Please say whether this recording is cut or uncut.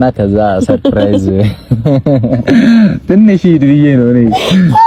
uncut